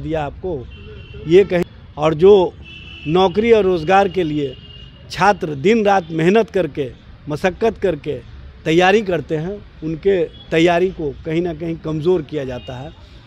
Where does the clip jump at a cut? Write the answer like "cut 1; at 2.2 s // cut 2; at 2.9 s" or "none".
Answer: cut 1; at 1.6 s